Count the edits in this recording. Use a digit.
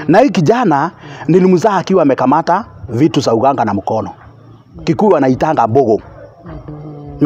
0